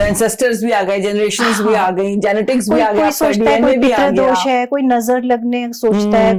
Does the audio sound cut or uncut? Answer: uncut